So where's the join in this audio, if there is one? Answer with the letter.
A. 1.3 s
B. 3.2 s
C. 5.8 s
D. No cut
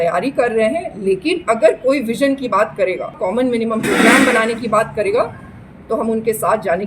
B